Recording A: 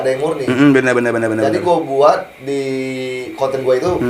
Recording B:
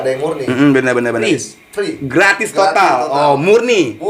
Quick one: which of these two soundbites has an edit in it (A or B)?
B